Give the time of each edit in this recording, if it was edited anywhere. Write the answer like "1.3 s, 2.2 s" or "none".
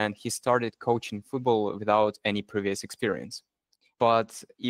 none

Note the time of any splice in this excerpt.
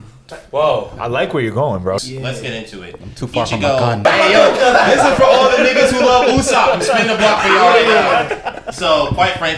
2.0 s, 4.0 s, 8.3 s

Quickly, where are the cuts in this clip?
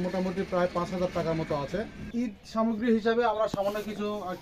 2.0 s

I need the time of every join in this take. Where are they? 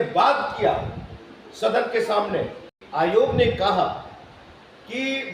2.8 s

